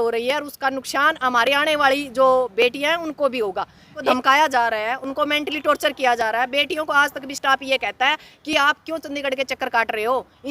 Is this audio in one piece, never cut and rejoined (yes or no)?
no